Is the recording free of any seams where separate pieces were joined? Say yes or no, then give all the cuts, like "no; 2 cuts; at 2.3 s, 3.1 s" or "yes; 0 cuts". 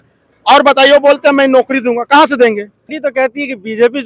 no; 1 cut; at 2.9 s